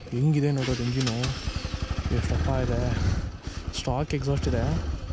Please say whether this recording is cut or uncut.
uncut